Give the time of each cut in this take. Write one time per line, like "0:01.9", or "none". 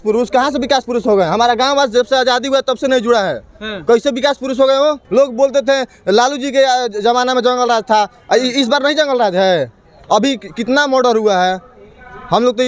0:05.0